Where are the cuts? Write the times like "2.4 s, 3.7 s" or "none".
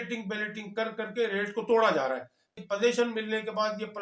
2.6 s